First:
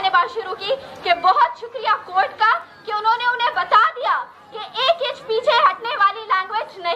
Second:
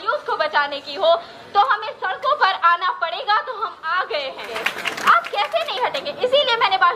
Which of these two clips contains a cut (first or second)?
second